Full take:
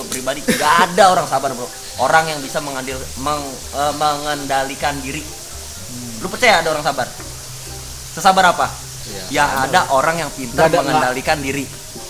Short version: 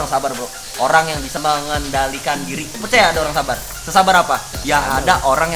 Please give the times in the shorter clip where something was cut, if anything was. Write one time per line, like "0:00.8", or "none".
0:01.4
0:02.8
0:03.7
0:04.5